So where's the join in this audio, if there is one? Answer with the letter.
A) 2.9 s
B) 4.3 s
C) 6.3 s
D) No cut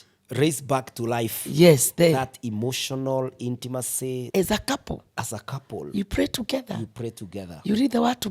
B